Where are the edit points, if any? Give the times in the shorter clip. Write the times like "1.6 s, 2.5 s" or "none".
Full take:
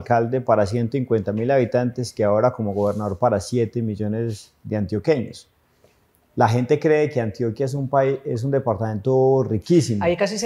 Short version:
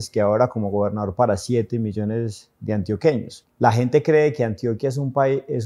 3.4 s